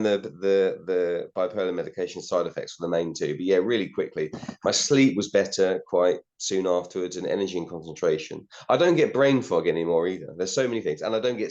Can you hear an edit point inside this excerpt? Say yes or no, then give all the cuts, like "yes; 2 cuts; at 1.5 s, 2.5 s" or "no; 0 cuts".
no; 0 cuts